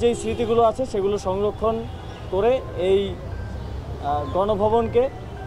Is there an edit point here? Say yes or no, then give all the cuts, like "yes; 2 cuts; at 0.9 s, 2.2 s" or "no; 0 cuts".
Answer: no; 0 cuts